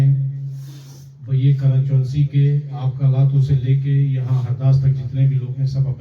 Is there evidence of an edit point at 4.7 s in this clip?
no; 1 cut; at 1.6 s

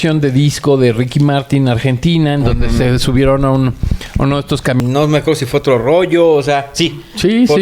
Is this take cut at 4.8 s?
yes; 1 cut; at 4.8 s

